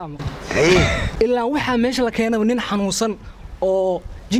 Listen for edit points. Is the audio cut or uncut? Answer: cut